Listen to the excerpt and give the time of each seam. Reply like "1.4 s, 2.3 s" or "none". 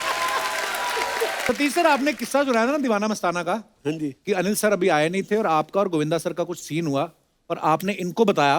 1.5 s

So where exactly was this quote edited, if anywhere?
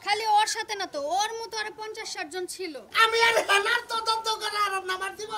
2.9 s

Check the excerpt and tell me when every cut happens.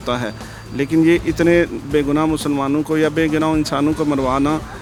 none

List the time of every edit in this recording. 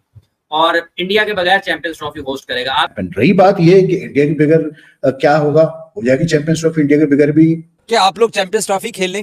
3.0 s, 7.7 s

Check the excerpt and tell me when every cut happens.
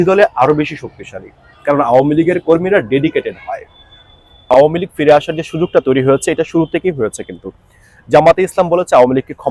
4.4 s

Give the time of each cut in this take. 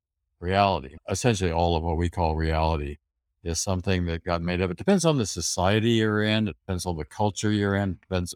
0.9 s

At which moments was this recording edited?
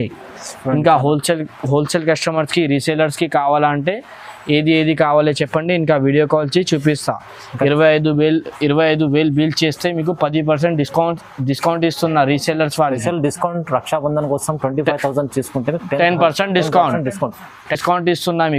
none

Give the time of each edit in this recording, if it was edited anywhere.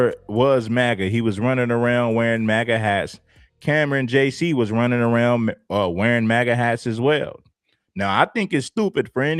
none

